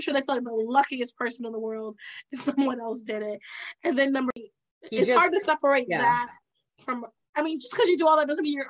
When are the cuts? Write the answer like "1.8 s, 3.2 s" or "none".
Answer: 4.5 s